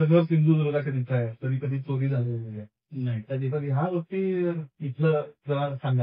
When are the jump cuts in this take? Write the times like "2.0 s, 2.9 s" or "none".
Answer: none